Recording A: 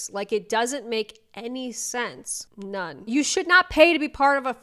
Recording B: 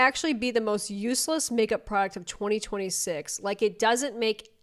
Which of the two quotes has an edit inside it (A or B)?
A